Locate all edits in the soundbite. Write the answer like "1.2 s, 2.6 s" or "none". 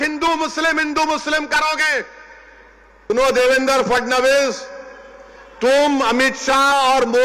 3.1 s